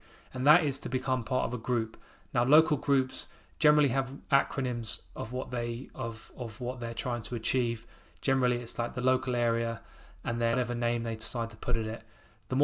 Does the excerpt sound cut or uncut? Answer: uncut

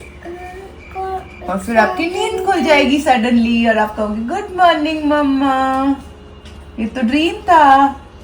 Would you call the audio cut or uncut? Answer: uncut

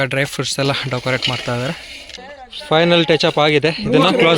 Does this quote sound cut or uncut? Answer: cut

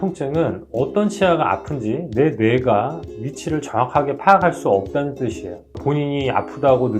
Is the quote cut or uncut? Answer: cut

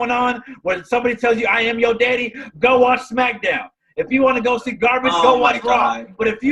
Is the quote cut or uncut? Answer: uncut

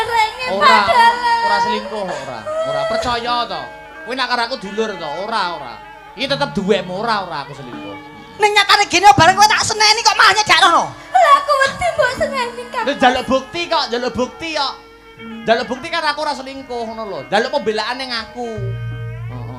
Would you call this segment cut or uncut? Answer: uncut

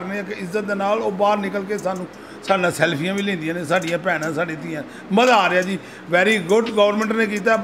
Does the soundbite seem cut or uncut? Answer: uncut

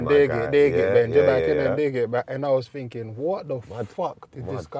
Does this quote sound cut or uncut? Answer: uncut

